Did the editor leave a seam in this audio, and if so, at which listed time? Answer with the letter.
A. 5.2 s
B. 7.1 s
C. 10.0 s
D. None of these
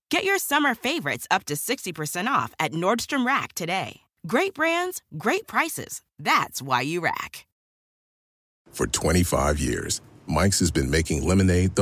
C